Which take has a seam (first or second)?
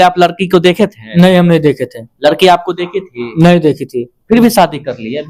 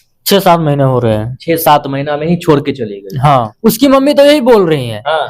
second